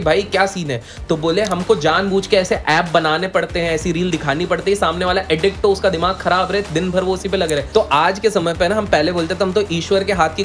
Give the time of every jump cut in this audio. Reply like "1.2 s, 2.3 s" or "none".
7.6 s